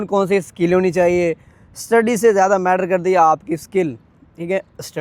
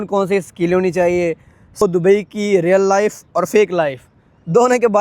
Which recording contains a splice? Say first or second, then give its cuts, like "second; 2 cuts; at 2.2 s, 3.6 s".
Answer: second; 1 cut; at 1.8 s